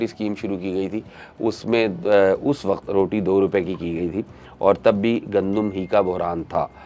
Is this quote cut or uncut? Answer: uncut